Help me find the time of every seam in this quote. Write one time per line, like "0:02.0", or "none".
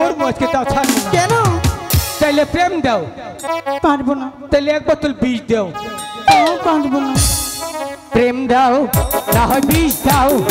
0:03.4